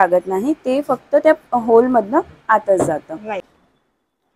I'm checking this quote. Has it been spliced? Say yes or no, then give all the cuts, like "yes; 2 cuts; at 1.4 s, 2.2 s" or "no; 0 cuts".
yes; 1 cut; at 3.4 s